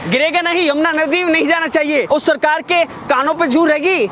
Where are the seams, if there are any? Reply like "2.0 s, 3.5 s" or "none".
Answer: 2.1 s